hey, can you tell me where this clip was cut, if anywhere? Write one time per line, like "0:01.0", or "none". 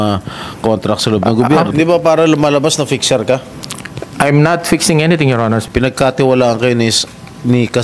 0:01.7
0:05.6